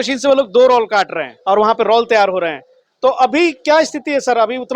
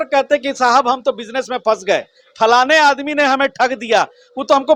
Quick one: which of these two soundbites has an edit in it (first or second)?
first